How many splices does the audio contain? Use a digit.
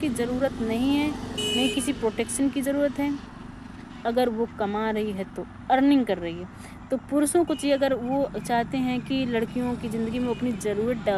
1